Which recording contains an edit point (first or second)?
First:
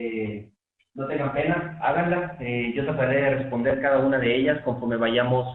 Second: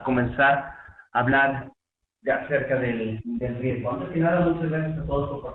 first